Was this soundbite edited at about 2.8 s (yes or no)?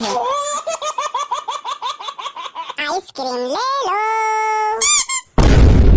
yes